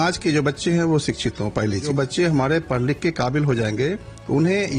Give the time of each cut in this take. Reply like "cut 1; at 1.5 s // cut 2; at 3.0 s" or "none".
cut 1; at 1.9 s